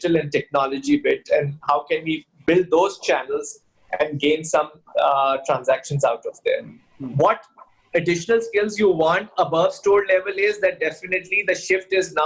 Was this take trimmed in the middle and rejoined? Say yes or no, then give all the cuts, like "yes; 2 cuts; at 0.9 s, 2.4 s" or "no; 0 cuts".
yes; 1 cut; at 6.8 s